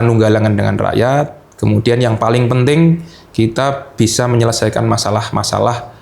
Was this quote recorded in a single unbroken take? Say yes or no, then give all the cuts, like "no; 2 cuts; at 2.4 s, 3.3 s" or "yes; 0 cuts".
yes; 0 cuts